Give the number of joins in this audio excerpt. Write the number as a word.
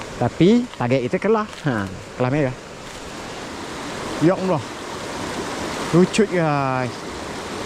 two